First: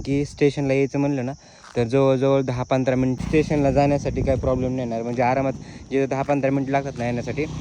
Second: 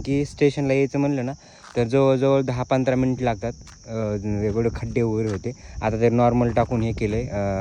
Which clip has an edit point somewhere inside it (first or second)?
first